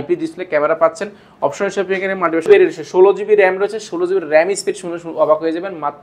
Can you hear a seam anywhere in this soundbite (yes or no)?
yes